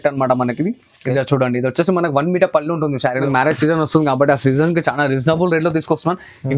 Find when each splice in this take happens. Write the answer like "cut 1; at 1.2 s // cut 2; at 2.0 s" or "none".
cut 1; at 3.2 s